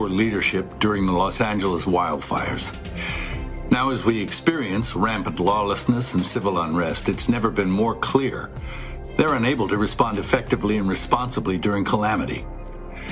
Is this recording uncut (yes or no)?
yes